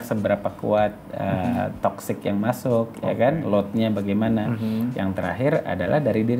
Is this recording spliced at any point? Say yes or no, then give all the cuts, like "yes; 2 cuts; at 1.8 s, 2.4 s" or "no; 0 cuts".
no; 0 cuts